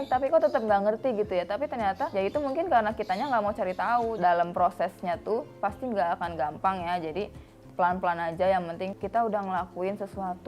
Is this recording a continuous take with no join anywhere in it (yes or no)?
no